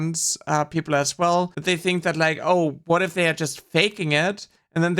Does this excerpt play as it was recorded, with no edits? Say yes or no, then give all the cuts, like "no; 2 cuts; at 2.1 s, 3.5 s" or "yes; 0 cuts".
no; 1 cut; at 1.5 s